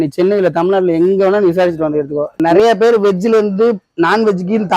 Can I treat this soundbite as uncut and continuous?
no; 1 cut; at 2.3 s

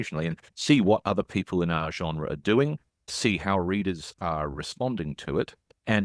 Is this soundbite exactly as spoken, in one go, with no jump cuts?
yes; 0 cuts

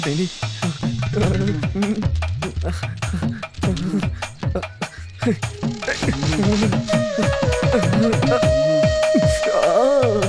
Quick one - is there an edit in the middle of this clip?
no; 0 cuts

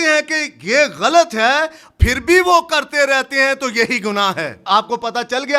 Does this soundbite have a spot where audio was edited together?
yes; 1 cut; at 4.7 s

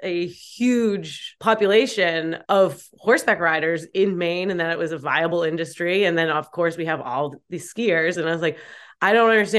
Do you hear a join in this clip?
yes; 2 cuts; at 1.3 s, 2.3 s

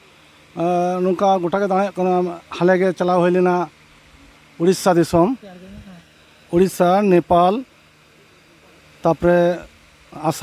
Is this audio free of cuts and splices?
yes; 0 cuts

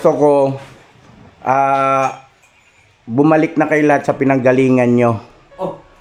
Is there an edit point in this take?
no; 0 cuts

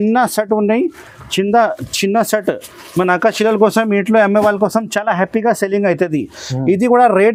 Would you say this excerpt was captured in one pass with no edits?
yes; 0 cuts

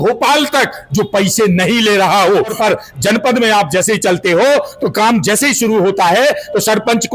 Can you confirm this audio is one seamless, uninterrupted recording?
no; 1 cut; at 2.5 s

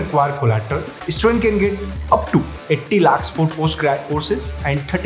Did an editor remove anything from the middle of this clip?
yes; 1 cut; at 0.9 s

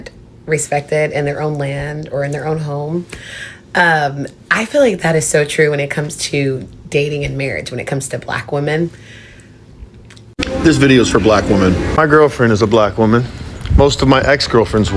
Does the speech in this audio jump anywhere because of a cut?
yes; 1 cut; at 10.2 s

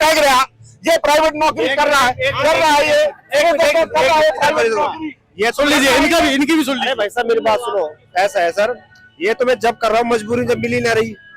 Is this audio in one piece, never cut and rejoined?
yes; 0 cuts

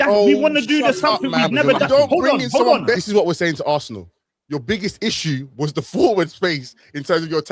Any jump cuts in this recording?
yes; 1 cut; at 3.0 s

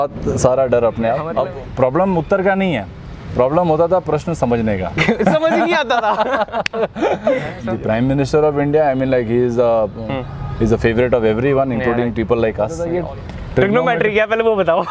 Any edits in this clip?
yes; 3 cuts; at 1.3 s, 7.6 s, 12.8 s

